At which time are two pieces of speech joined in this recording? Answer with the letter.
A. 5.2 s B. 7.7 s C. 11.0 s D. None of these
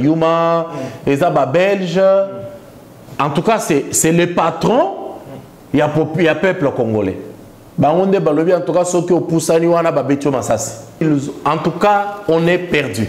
C